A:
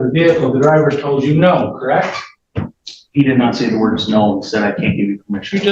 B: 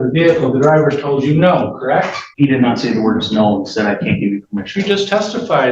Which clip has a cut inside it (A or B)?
B